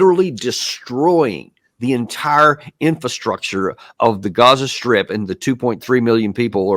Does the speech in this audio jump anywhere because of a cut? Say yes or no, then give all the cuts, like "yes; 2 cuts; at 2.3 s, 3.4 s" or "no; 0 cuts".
no; 0 cuts